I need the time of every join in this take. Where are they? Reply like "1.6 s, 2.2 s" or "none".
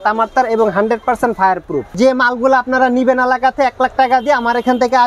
1.9 s